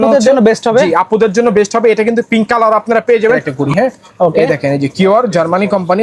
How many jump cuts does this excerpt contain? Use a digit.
1